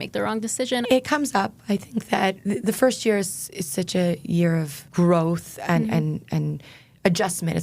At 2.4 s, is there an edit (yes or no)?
yes